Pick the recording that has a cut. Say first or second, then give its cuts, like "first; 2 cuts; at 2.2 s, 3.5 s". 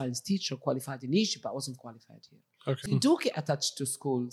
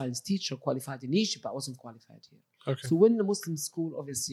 first; 1 cut; at 2.9 s